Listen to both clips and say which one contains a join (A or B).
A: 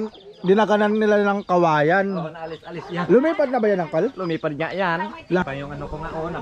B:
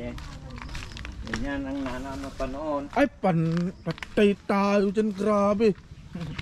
A